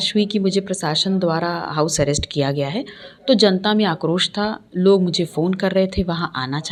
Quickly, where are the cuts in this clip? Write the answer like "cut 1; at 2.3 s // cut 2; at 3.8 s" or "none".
none